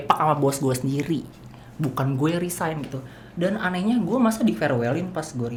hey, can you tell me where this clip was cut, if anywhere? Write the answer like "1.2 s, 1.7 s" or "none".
none